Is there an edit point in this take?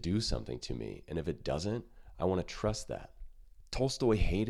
no; 0 cuts

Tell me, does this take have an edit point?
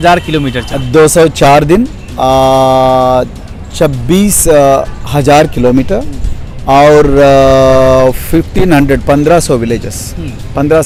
no; 0 cuts

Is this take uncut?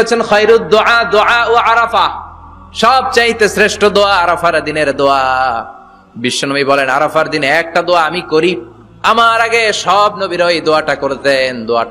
yes; 0 cuts

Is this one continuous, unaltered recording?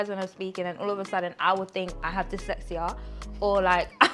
yes; 0 cuts

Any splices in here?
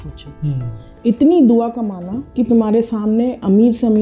no; 0 cuts

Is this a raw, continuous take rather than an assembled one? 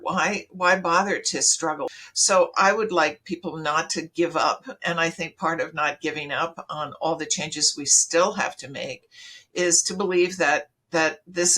no; 1 cut; at 1.9 s

